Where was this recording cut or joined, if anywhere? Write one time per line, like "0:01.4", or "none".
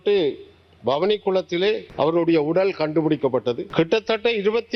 0:01.9
0:03.6